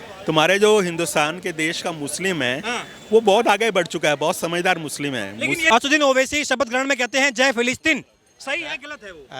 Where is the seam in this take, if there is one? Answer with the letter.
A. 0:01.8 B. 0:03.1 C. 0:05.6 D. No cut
C